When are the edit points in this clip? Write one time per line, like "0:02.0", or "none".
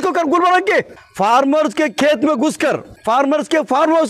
0:01.0
0:02.9

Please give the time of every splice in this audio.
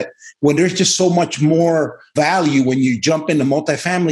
0:02.1

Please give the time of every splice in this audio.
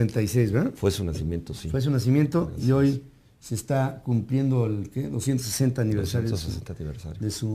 0:04.0

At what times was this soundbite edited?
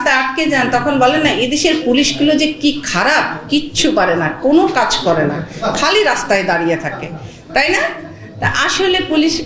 none

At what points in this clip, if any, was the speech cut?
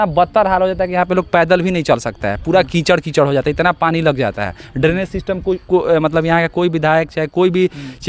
none

